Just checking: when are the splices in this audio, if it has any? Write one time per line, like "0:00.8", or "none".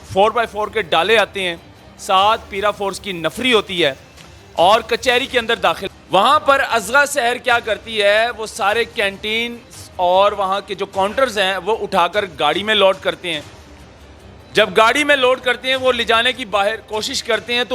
0:05.8